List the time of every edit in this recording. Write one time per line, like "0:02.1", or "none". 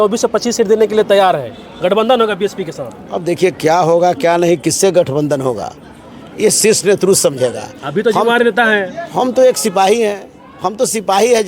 none